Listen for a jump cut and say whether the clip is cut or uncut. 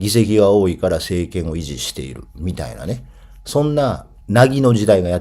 cut